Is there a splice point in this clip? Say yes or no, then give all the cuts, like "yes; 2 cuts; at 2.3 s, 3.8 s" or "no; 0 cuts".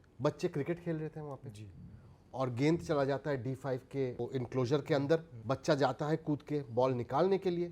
yes; 2 cuts; at 4.1 s, 5.3 s